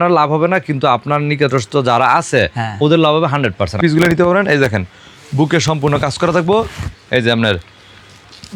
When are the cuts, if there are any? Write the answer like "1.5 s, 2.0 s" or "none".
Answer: 3.8 s